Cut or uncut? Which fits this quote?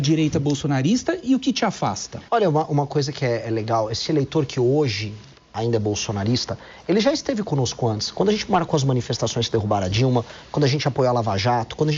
cut